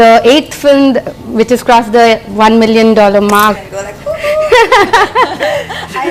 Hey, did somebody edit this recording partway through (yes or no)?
yes